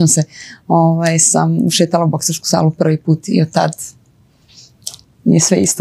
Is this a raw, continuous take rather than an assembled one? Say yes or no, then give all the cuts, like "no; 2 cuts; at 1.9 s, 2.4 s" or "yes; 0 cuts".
yes; 0 cuts